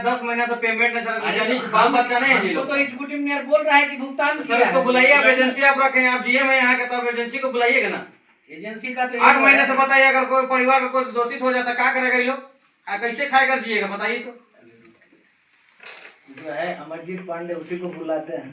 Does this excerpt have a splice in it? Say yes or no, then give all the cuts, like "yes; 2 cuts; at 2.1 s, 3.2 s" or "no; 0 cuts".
no; 0 cuts